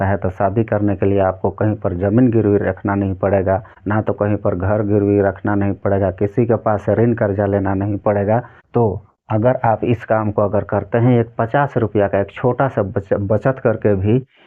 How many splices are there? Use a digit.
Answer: 2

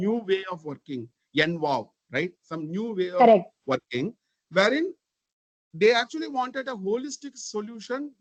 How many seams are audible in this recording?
0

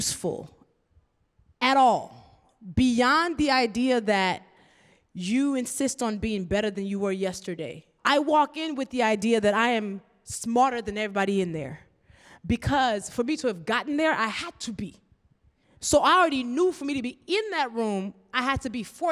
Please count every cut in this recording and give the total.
1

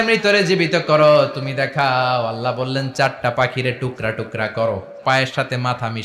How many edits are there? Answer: 1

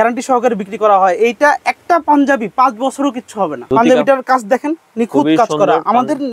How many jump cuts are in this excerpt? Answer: 1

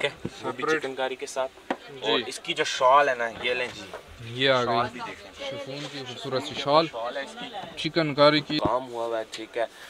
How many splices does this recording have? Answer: 1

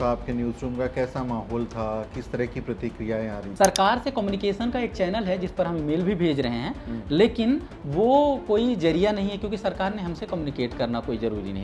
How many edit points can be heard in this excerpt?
1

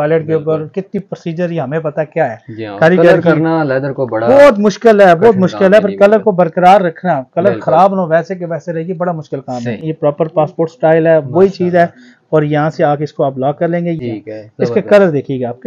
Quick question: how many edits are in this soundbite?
2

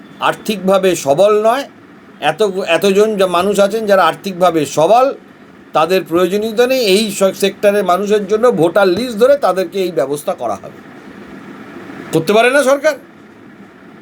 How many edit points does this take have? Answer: 0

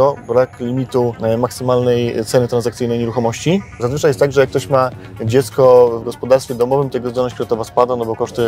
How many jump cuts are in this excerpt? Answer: 2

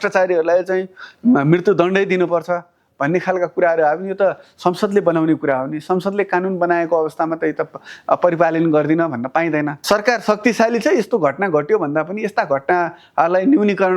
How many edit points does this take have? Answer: 1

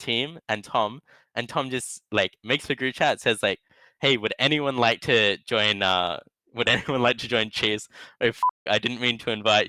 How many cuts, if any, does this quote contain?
0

